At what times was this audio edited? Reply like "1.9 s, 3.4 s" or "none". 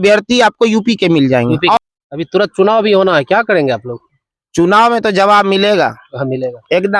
1.8 s